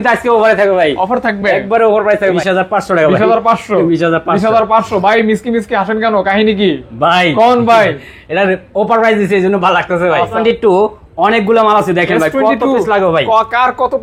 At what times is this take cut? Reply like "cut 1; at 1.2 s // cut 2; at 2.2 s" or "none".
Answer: cut 1; at 2.4 s // cut 2; at 10.4 s